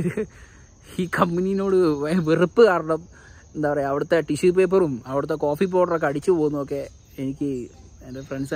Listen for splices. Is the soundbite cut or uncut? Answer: uncut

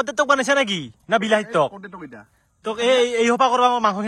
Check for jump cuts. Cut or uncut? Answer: uncut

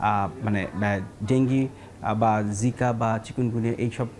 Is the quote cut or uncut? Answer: uncut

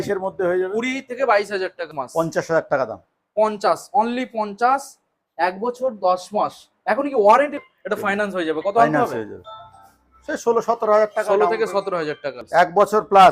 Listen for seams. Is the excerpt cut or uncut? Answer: cut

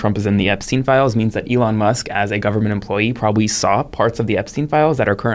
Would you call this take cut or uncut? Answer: uncut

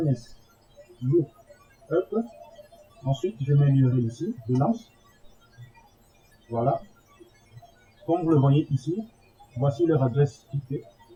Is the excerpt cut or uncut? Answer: uncut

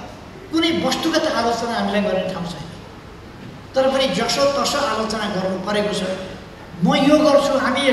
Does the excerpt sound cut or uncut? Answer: uncut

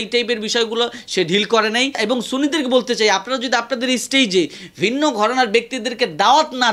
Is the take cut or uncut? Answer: cut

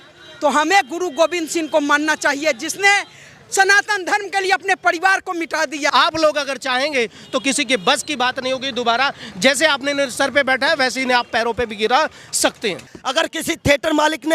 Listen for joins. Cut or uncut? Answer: cut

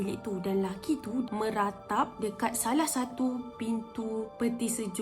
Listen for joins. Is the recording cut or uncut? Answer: cut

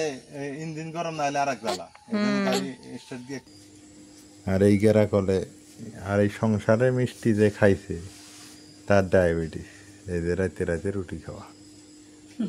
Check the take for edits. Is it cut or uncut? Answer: cut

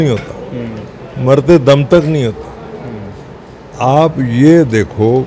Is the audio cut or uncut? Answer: uncut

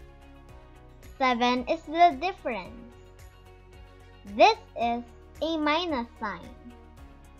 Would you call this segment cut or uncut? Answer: uncut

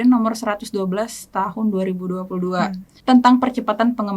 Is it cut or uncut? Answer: cut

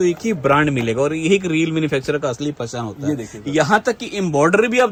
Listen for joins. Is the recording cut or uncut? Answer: uncut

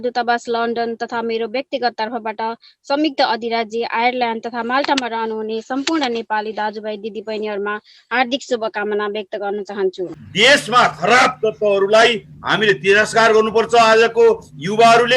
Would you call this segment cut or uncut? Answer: cut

